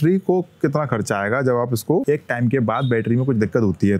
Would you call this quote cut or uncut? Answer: cut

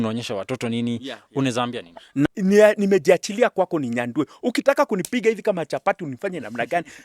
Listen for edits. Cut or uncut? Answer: cut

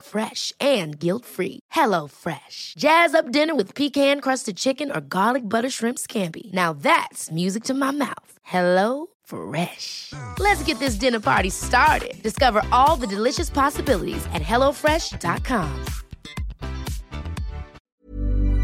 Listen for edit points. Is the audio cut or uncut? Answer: cut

